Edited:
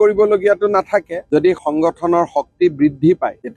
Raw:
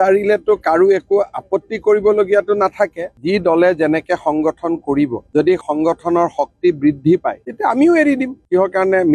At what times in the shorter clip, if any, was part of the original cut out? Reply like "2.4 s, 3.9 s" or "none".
1.2 s